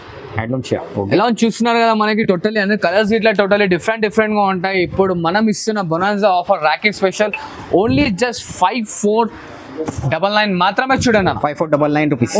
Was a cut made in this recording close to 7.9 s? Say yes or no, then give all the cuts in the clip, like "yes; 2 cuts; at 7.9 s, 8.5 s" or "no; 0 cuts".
no; 0 cuts